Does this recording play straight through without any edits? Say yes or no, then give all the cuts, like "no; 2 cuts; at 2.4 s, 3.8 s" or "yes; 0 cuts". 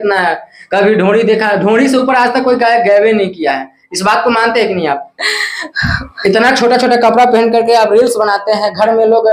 yes; 0 cuts